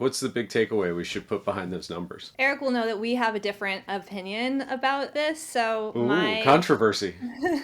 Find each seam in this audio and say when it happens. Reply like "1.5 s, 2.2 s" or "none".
2.2 s, 5.1 s

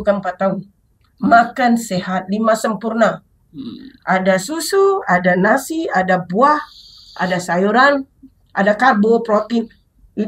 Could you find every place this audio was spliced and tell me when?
none

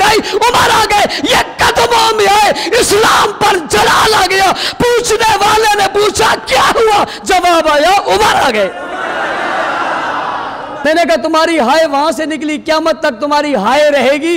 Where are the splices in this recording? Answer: 10.8 s

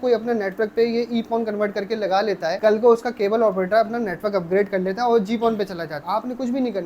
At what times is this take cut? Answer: 2.6 s, 5.9 s

